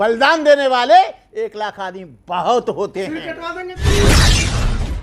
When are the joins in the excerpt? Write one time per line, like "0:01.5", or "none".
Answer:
0:03.7